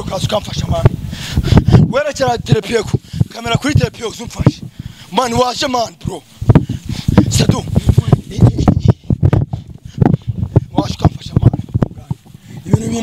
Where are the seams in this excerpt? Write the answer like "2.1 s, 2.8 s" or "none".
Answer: 11.8 s